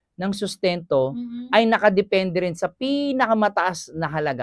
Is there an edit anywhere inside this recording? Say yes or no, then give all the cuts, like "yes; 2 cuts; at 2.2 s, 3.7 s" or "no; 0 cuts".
no; 0 cuts